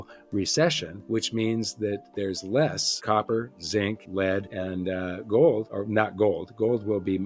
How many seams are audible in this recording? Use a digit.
4